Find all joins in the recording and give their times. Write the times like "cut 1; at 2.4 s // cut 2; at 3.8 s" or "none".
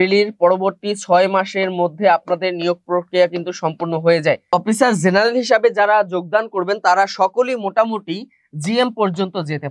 cut 1; at 4.5 s